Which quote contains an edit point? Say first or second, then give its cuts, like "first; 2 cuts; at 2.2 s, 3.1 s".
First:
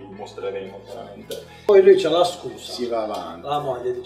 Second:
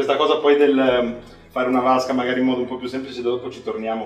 first; 1 cut; at 1.7 s